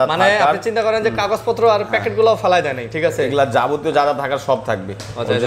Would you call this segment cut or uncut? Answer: uncut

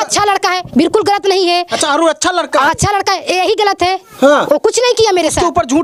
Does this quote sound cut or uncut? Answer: uncut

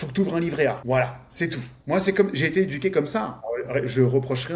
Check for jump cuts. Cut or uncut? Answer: cut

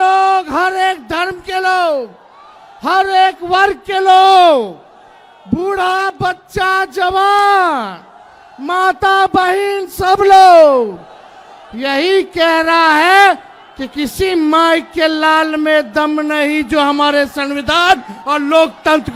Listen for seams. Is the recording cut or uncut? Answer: uncut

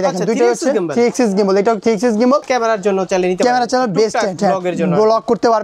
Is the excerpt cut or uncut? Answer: cut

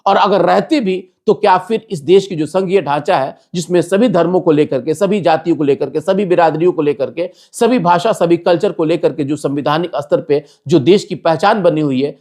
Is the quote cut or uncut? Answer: uncut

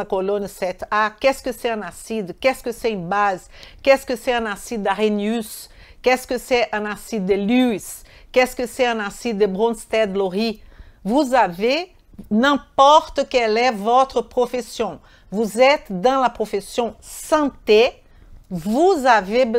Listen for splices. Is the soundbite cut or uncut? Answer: uncut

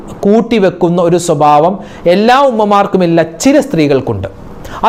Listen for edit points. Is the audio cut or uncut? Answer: uncut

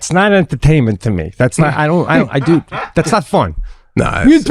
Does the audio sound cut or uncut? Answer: uncut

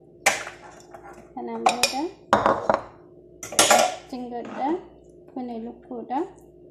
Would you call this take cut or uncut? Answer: uncut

